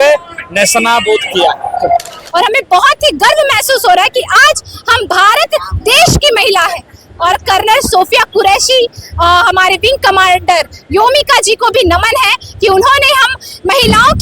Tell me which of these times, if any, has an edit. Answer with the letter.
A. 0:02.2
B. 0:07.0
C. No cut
A